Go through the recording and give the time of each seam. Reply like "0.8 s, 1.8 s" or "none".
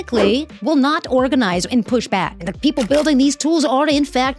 2.3 s